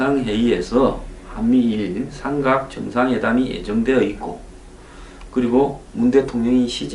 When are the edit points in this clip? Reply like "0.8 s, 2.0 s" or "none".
2.9 s